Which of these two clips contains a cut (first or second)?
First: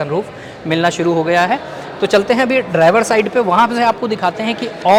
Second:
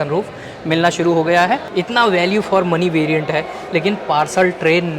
second